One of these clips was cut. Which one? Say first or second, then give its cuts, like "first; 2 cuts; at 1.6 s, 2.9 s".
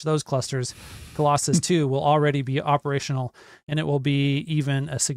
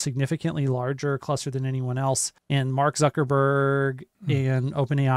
second; 2 cuts; at 2.3 s, 4.1 s